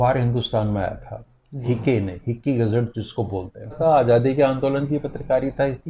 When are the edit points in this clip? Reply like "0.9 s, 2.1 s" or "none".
3.8 s